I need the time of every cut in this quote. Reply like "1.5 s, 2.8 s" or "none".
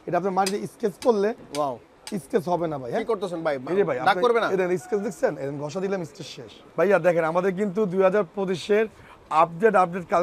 6.6 s